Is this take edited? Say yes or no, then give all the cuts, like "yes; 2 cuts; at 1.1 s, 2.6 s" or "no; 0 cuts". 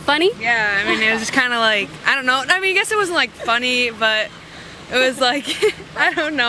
no; 0 cuts